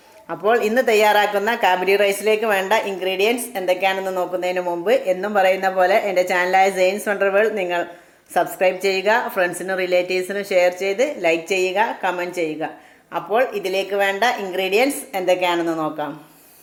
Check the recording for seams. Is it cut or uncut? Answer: uncut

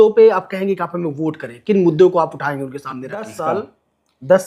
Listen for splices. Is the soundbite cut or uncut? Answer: cut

